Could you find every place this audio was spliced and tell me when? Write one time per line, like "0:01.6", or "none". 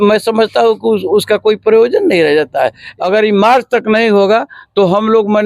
0:02.8